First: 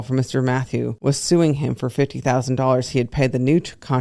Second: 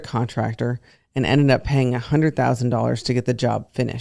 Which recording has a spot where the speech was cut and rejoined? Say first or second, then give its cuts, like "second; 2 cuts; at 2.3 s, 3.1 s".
first; 1 cut; at 1.0 s